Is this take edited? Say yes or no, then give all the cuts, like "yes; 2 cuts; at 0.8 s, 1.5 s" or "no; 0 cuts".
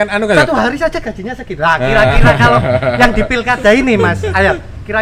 no; 0 cuts